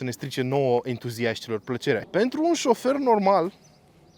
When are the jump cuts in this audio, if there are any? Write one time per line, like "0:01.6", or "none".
0:02.0